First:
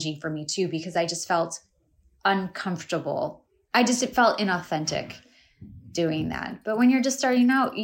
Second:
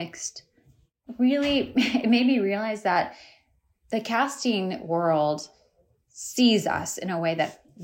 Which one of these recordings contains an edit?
second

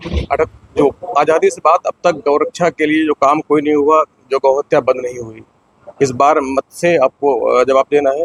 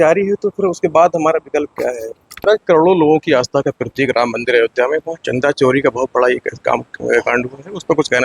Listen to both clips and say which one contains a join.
second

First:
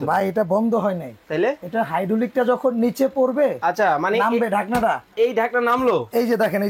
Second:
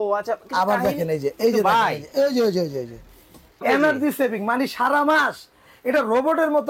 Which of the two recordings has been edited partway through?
second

